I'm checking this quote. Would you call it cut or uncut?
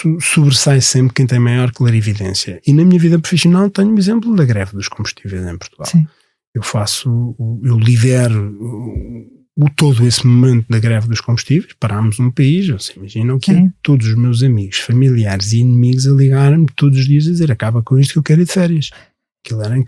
uncut